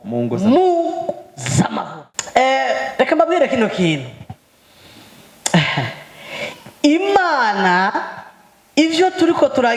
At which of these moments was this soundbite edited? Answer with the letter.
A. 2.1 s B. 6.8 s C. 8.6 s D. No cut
A